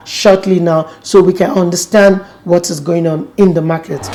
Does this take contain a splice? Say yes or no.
no